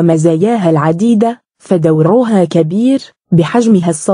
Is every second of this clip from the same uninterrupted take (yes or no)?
no